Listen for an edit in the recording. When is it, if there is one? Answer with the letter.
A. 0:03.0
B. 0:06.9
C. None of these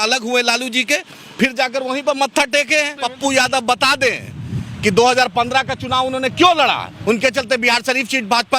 A